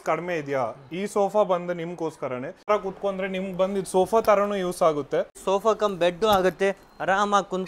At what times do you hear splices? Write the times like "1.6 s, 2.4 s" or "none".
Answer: 5.4 s